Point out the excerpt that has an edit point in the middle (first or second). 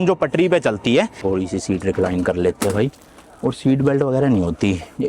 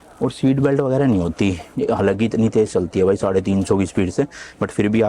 first